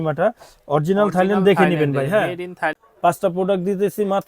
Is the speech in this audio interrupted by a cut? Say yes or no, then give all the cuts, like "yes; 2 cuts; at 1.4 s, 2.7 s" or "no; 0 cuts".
yes; 1 cut; at 2.8 s